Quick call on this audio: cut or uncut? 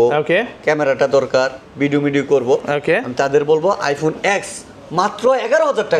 uncut